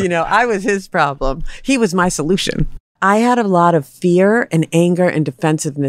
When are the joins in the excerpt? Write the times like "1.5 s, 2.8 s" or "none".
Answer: 2.8 s